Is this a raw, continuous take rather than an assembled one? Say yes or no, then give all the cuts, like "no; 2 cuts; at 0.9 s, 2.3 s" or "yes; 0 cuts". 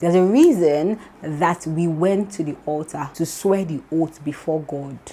no; 1 cut; at 3.0 s